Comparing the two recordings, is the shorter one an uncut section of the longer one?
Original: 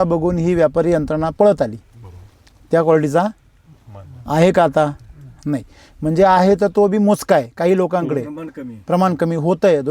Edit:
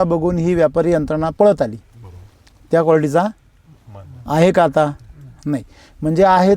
yes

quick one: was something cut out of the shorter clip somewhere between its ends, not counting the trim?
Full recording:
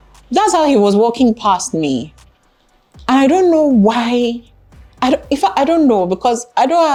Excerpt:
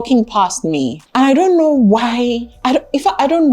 yes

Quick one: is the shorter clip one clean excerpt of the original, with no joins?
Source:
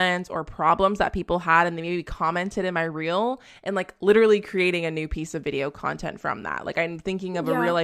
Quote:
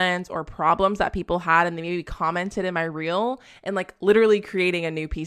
yes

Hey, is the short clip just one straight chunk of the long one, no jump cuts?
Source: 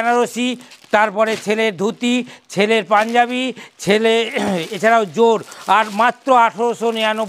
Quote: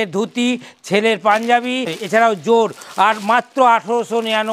no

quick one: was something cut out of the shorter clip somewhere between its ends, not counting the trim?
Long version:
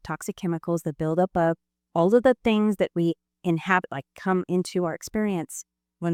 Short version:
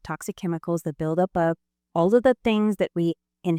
no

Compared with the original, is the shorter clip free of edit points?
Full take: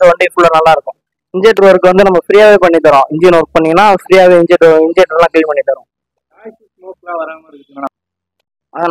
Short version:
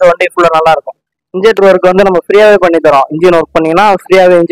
yes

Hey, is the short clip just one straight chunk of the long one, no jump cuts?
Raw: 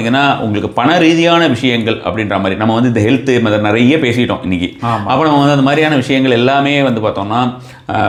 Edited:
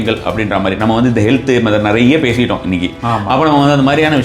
yes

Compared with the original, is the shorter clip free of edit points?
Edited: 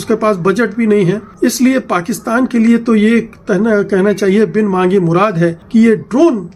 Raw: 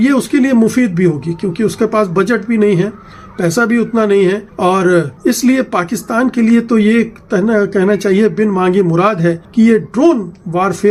no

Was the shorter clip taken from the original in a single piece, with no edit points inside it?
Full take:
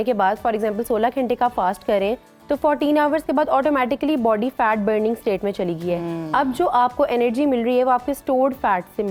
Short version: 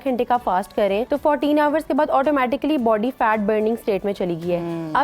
no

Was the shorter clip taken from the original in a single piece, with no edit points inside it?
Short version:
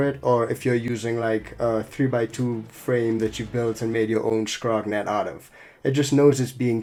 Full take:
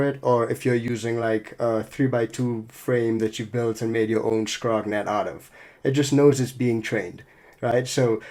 yes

